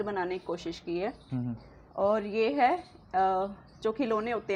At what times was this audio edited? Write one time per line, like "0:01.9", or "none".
none